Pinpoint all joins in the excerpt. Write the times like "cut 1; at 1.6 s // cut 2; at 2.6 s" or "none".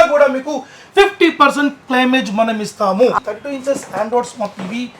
cut 1; at 3.2 s